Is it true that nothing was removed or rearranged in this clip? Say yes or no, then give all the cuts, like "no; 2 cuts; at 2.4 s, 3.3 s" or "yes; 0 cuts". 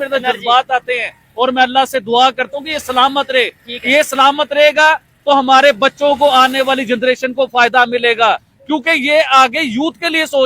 yes; 0 cuts